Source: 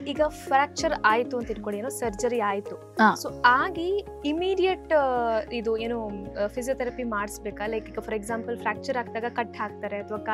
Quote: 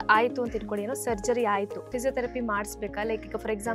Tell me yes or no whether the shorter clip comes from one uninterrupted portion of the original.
no